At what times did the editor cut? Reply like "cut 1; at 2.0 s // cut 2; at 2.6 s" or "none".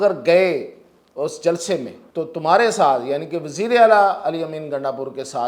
cut 1; at 2.0 s